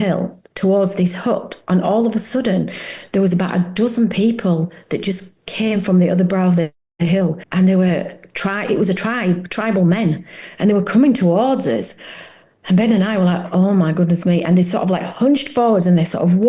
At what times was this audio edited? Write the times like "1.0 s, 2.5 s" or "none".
7.4 s